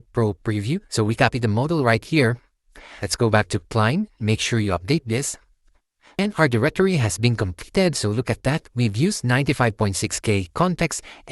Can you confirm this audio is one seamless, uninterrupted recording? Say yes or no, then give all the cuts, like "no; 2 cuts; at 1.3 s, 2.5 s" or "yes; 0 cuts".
no; 1 cut; at 6.2 s